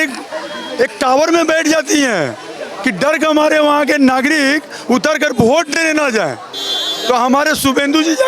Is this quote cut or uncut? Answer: uncut